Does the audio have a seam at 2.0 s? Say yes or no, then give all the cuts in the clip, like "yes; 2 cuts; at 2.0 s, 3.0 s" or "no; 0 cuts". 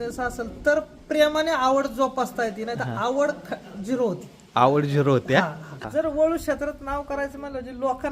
no; 1 cut; at 5.8 s